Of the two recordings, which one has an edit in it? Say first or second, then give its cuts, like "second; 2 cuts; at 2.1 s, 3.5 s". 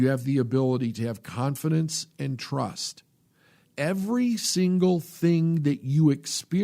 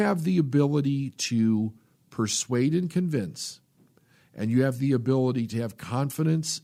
first; 1 cut; at 3.6 s